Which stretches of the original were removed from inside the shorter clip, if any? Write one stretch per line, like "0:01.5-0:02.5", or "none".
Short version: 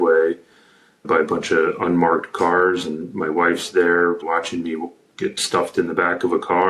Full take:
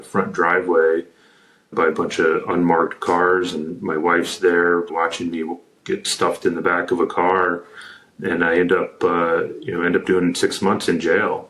none